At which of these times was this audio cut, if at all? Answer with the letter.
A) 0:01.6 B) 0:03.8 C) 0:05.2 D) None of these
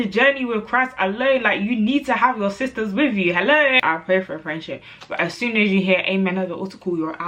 B